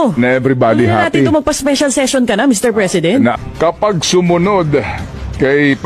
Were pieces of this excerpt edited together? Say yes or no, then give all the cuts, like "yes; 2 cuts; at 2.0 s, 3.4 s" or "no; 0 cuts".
yes; 1 cut; at 3.3 s